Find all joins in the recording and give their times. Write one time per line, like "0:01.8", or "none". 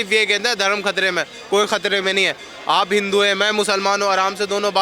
none